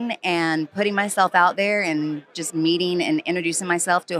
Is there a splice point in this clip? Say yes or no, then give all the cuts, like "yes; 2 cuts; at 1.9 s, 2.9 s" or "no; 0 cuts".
no; 0 cuts